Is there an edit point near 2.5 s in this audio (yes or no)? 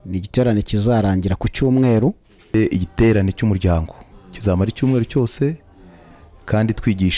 yes